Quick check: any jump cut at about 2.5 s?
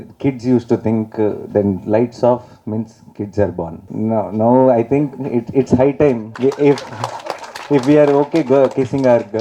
no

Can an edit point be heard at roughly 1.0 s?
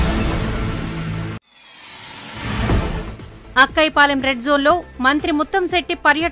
yes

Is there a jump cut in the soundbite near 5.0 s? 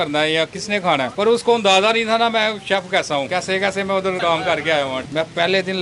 yes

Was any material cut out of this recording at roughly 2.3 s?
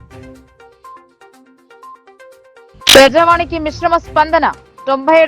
yes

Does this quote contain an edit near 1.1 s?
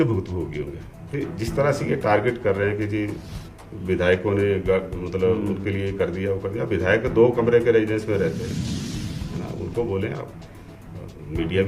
yes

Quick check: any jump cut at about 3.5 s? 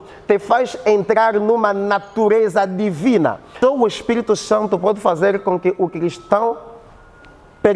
yes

